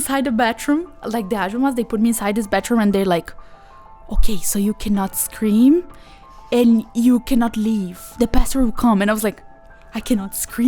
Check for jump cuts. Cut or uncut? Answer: cut